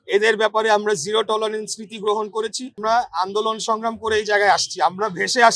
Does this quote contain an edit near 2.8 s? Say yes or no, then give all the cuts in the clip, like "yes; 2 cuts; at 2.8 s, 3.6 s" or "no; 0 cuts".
yes; 1 cut; at 2.8 s